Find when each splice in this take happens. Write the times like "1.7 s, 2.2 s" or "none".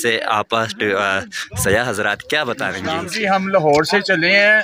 3.1 s